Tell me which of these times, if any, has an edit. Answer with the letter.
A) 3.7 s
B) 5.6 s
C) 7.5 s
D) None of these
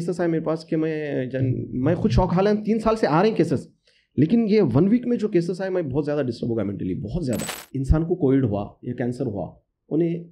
C